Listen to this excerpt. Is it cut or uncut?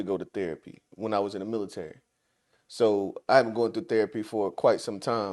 uncut